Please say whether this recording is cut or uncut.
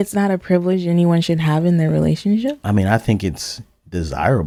uncut